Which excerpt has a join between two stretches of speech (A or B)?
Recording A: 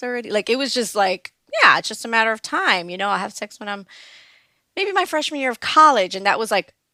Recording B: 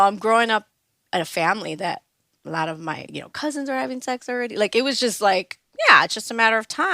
B